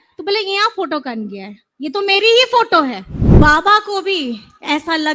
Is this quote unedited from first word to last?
no; 1 cut; at 3.1 s

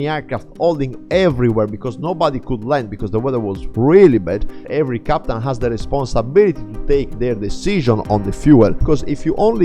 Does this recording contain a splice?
yes; 2 cuts; at 4.7 s, 8.8 s

